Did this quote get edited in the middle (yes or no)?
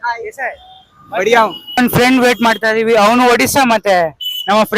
yes